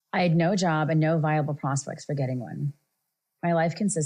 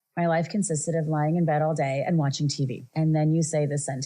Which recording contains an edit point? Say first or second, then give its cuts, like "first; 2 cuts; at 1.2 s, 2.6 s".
second; 1 cut; at 2.9 s